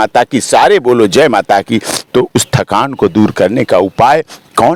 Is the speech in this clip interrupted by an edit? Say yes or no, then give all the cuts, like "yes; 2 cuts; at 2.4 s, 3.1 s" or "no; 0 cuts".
no; 0 cuts